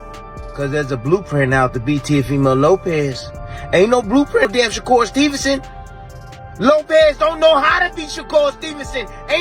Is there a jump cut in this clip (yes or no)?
yes